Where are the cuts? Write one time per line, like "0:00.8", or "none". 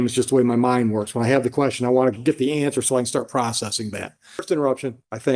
0:04.4